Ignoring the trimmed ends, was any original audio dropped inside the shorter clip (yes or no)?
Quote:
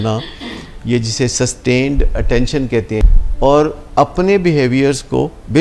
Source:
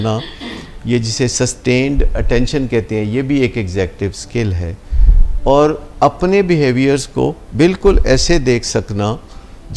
yes